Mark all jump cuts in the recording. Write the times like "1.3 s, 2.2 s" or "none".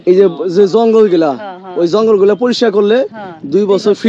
none